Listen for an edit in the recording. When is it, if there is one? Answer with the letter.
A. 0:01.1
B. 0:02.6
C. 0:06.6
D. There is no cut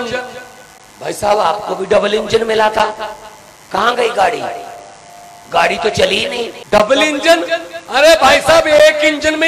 C